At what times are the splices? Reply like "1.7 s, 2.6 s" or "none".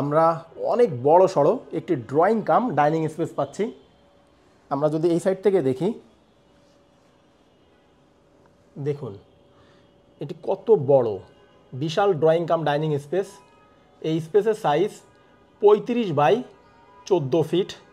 none